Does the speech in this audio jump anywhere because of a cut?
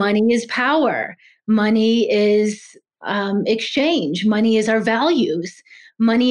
yes; 1 cut; at 2.9 s

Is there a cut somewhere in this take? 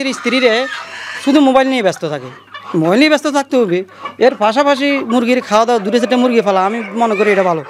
no; 0 cuts

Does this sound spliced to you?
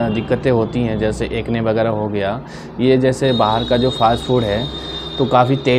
no; 0 cuts

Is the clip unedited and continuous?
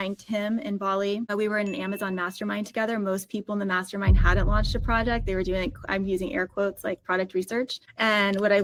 yes; 0 cuts

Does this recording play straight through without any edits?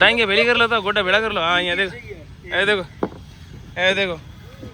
yes; 0 cuts

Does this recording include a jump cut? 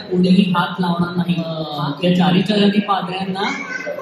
yes; 1 cut; at 1.6 s

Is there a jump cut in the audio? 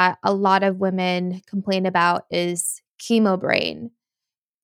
no; 0 cuts

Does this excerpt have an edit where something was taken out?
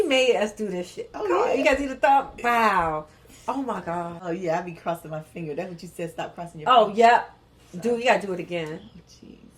yes; 1 cut; at 4.2 s

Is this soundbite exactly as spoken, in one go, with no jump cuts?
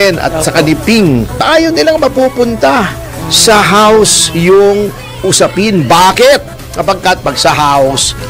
no; 1 cut; at 1.4 s

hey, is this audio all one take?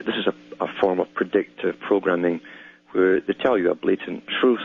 yes; 0 cuts

